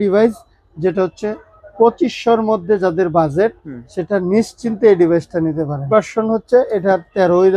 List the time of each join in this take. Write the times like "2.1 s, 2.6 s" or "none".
5.8 s